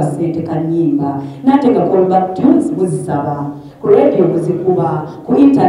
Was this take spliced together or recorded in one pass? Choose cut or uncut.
uncut